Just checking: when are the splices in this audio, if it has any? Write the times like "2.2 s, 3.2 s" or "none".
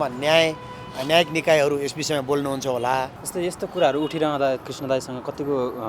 3.2 s, 4.6 s